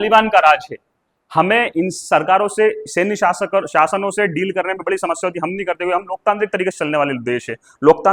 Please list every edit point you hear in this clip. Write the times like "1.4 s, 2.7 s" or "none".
none

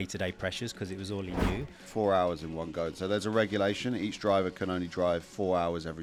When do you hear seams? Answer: 1.8 s

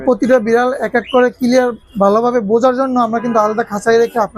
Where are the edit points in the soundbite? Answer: none

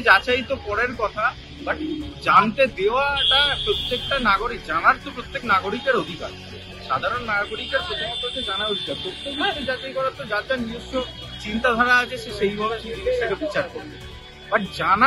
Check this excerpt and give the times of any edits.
none

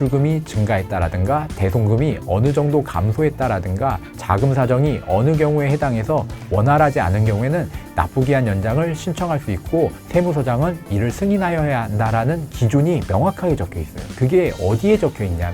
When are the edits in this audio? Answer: none

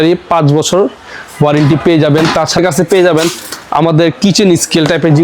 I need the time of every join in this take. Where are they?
2.6 s

